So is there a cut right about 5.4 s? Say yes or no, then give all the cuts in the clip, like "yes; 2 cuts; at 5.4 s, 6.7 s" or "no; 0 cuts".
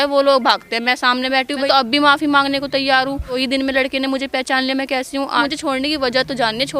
yes; 3 cuts; at 1.6 s, 3.4 s, 5.4 s